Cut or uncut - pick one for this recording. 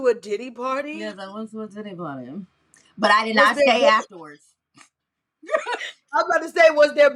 uncut